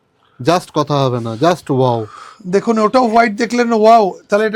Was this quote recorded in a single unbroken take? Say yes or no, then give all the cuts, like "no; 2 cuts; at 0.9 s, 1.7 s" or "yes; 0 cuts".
yes; 0 cuts